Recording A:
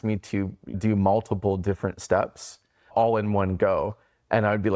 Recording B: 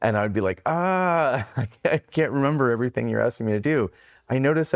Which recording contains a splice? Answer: A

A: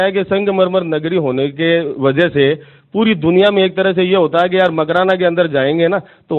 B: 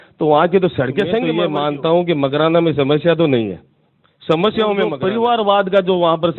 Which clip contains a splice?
B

